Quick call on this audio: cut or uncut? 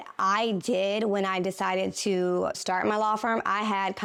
uncut